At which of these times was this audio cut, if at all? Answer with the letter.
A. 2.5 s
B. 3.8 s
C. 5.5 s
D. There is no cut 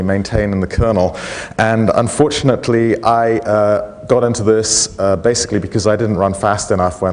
B